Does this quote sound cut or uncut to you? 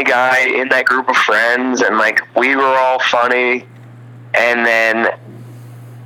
uncut